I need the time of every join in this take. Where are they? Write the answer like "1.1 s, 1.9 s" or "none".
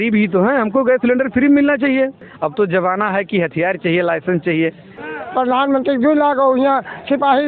2.3 s, 4.9 s

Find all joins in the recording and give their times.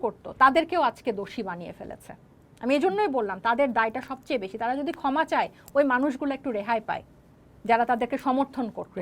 none

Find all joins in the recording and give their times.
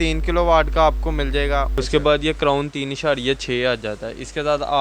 1.8 s

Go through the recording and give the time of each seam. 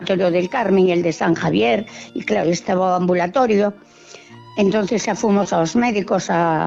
none

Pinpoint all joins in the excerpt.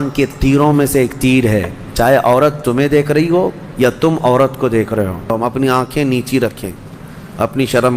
5.3 s

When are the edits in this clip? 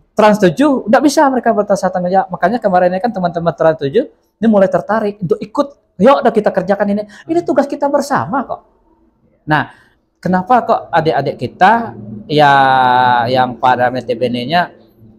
none

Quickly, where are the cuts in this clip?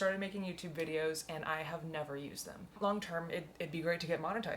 2.8 s

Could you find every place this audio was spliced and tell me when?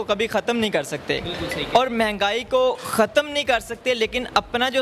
none

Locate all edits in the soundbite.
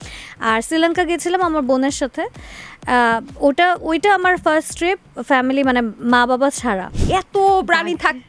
6.9 s

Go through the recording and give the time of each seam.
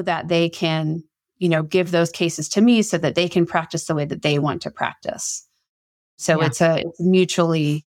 none

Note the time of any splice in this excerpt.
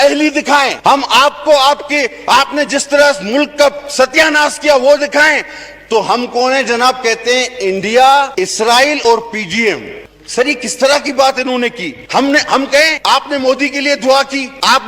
10.0 s

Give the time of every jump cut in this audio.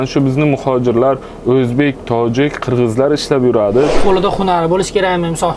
4.0 s

